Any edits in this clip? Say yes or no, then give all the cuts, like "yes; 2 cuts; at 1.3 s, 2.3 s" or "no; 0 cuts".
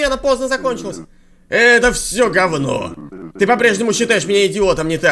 no; 0 cuts